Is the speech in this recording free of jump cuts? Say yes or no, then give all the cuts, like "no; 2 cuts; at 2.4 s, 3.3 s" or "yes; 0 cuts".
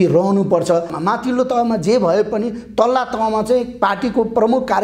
no; 1 cut; at 0.9 s